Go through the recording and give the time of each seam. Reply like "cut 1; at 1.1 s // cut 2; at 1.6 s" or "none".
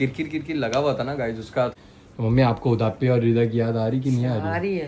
cut 1; at 1.7 s